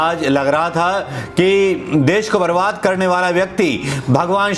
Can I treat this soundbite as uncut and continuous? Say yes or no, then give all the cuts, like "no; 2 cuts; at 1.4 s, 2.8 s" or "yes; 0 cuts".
yes; 0 cuts